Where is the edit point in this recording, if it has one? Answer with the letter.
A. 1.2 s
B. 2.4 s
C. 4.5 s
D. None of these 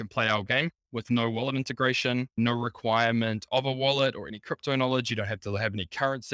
D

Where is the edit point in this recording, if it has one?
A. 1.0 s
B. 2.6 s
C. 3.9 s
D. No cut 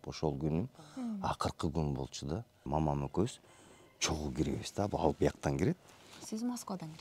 B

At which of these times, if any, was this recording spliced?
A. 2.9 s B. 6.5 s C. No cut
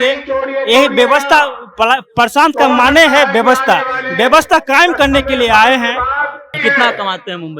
B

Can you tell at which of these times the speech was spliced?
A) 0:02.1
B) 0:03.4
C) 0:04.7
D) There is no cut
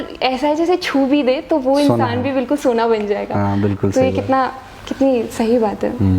D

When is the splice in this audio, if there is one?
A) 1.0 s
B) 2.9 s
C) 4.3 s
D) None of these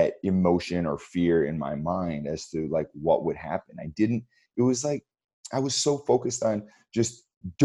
D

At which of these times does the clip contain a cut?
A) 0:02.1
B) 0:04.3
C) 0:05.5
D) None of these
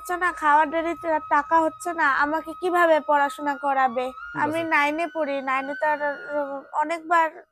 B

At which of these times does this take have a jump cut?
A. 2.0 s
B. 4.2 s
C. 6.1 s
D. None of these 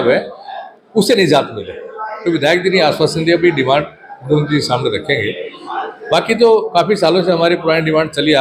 D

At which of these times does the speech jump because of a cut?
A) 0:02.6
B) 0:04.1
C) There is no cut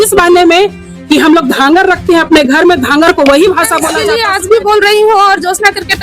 B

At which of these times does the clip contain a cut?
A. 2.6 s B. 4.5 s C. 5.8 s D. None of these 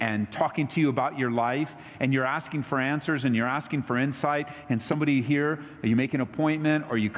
D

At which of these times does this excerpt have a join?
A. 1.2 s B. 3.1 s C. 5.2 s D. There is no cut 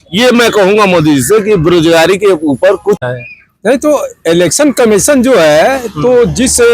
B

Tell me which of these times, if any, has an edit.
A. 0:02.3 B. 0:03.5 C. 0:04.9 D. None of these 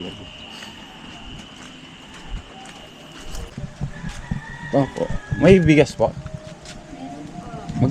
B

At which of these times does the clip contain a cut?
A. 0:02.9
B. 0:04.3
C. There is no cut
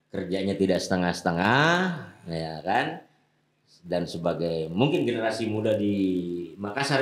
C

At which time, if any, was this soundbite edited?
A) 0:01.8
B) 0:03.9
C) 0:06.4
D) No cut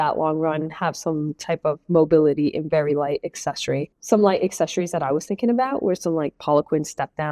B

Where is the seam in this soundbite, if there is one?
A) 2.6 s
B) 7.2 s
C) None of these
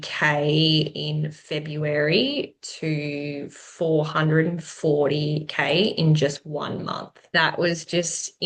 B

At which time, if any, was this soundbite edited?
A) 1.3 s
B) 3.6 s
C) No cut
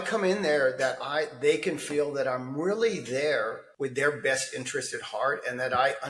B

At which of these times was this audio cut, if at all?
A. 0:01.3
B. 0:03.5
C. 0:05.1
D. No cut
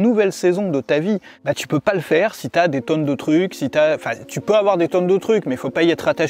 A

